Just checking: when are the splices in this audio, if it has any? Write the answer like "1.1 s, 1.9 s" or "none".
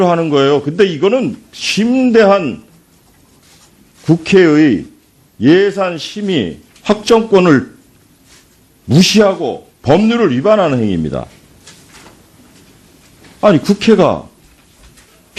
5.7 s